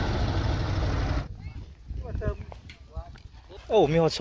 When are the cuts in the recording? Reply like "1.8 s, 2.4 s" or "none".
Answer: 1.2 s